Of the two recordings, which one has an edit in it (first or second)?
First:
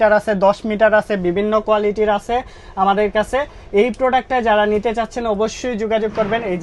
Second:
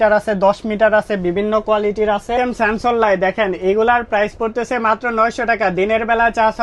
second